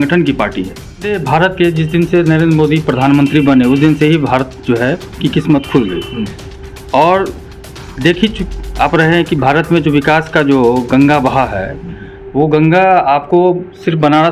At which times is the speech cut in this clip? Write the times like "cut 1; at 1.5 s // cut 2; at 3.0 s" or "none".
cut 1; at 1.2 s